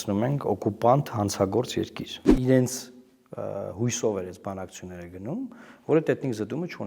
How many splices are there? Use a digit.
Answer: 1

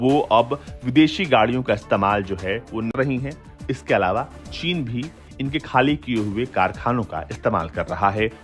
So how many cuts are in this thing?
1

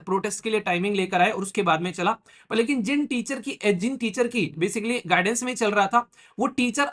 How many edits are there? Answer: 0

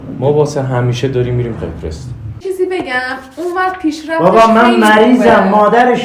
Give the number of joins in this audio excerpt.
1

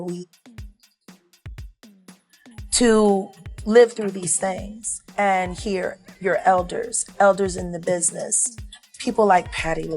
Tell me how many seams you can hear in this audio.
2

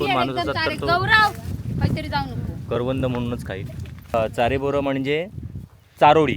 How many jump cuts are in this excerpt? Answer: 1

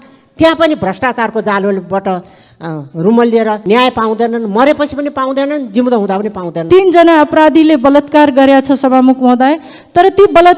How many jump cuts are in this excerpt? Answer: 2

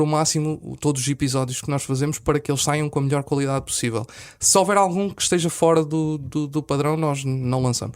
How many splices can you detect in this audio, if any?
0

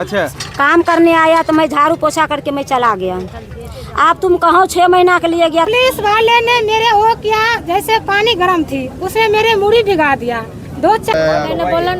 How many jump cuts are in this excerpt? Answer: 2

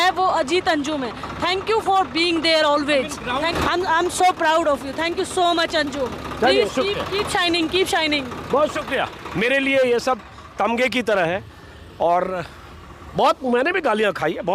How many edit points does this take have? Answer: 1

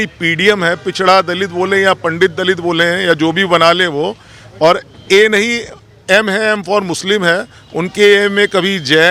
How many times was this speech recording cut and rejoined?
0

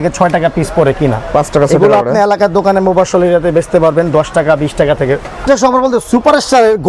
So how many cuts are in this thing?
1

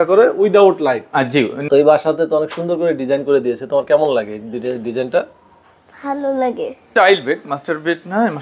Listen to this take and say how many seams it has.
2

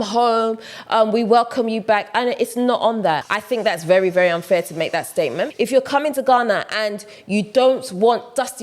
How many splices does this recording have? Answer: 2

